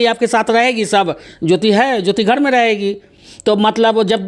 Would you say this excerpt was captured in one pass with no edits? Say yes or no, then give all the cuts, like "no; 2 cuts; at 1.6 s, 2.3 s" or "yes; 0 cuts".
yes; 0 cuts